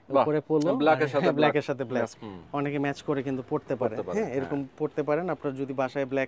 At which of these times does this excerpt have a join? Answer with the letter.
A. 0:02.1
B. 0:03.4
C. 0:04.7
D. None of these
A